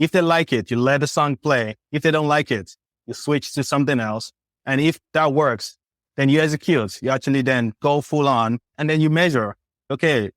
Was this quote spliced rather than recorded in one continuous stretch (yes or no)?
yes